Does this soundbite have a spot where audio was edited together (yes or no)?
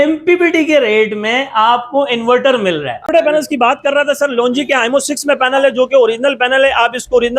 yes